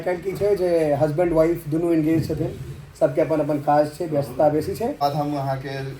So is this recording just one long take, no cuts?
no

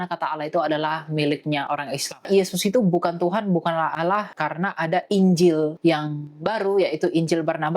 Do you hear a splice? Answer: yes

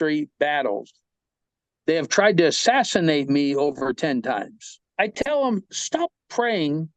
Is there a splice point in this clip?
yes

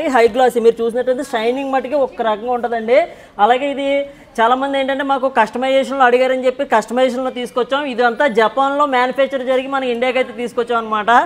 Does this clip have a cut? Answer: no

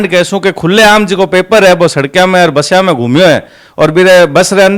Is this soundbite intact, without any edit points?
yes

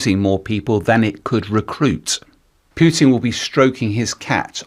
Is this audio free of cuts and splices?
no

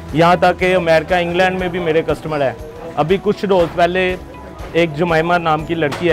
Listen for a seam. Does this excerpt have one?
no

